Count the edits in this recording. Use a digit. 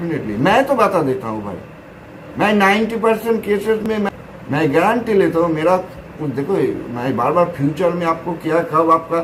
0